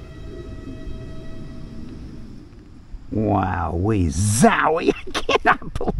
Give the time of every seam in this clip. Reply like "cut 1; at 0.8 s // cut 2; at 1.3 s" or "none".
cut 1; at 2.6 s